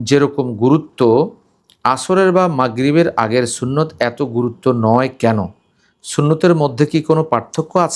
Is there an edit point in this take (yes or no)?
no